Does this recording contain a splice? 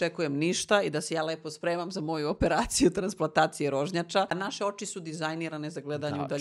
yes; 1 cut; at 4.3 s

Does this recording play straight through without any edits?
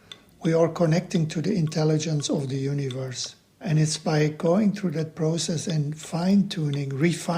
no; 1 cut; at 3.7 s

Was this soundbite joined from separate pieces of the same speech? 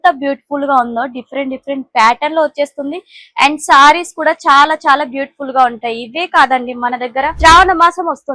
yes; 1 cut; at 7.3 s

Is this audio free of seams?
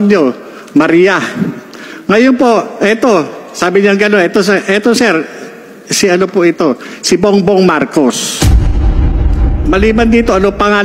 yes; 0 cuts

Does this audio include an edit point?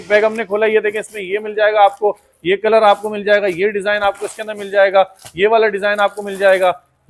no; 0 cuts

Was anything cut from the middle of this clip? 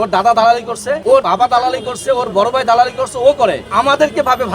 yes; 2 cuts; at 1.1 s, 3.6 s

